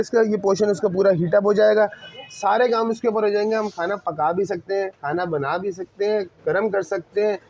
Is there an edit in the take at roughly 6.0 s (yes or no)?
no